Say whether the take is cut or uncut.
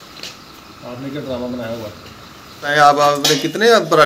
cut